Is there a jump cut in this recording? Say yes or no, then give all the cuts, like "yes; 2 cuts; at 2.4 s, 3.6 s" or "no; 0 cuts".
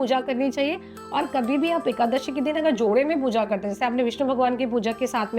no; 0 cuts